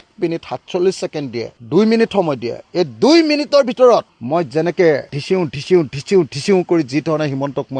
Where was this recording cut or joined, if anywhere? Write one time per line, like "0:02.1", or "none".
none